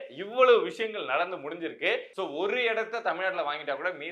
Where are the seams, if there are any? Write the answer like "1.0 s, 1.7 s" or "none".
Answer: 2.1 s